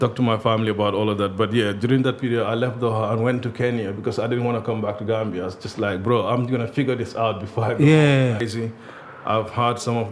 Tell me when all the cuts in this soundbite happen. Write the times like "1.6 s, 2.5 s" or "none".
8.5 s